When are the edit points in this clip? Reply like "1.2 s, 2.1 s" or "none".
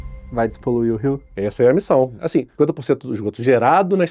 1.3 s, 2.2 s